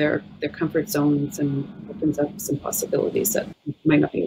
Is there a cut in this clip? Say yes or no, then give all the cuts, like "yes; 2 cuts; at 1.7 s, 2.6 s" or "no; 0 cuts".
yes; 1 cut; at 1.8 s